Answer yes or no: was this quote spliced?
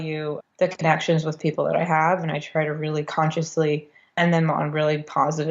no